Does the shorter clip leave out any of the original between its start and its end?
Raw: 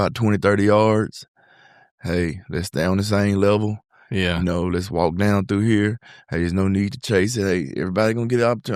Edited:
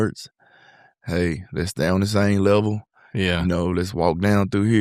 no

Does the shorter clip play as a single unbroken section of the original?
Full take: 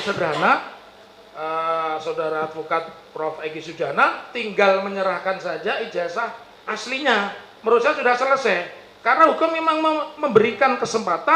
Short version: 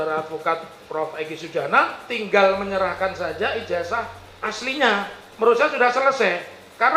yes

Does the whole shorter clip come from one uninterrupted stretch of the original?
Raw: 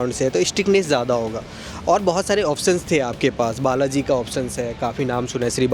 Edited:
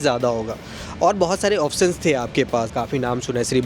no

